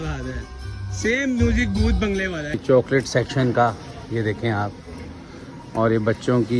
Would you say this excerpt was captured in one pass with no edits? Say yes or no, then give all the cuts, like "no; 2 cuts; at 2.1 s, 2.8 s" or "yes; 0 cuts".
no; 1 cut; at 2.6 s